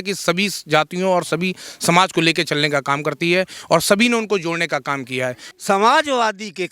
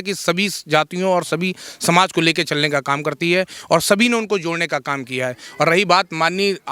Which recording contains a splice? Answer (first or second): first